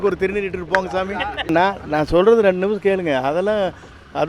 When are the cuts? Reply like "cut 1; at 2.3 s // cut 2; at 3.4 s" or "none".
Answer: cut 1; at 1.5 s